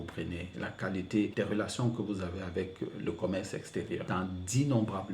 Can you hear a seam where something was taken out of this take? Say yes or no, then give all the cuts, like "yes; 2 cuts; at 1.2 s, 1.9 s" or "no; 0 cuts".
yes; 2 cuts; at 1.3 s, 4.0 s